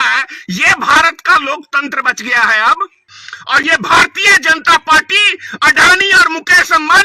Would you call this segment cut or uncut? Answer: cut